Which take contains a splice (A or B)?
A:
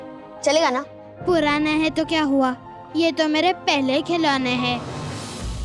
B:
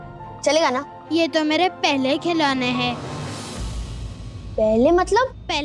B